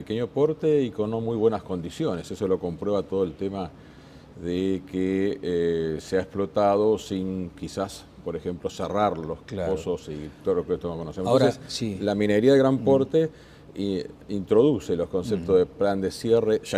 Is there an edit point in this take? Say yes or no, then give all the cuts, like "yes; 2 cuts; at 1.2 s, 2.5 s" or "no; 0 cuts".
yes; 1 cut; at 3.6 s